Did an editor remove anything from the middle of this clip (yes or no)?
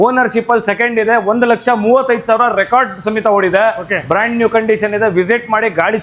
no